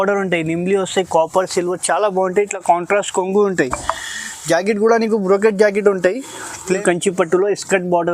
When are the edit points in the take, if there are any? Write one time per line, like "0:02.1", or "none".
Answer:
0:06.8